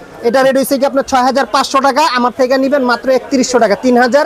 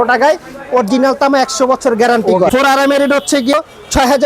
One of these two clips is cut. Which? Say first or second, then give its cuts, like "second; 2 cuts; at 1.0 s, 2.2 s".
second; 2 cuts; at 2.5 s, 3.5 s